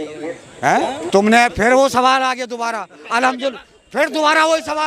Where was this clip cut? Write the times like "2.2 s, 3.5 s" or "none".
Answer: 1.0 s